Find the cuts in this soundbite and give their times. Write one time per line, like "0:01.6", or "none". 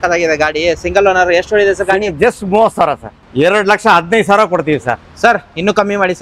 0:03.1